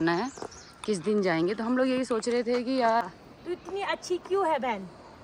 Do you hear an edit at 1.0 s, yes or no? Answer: no